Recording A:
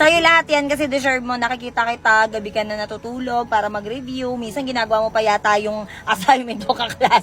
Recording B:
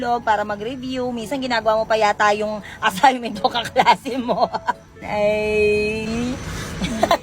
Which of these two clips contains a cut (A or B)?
B